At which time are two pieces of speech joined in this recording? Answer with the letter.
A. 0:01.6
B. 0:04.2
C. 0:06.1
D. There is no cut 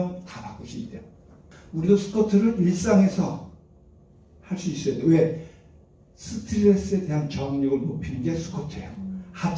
A